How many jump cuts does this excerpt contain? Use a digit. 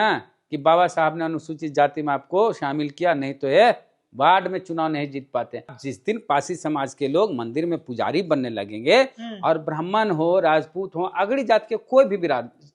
1